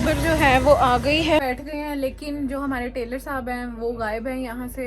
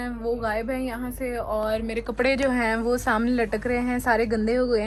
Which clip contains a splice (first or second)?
first